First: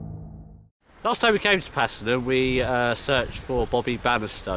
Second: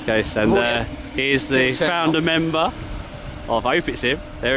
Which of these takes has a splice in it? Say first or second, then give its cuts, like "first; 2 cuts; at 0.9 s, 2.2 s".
first; 1 cut; at 3.4 s